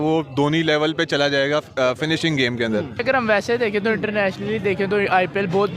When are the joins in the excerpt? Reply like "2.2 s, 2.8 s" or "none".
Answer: 3.0 s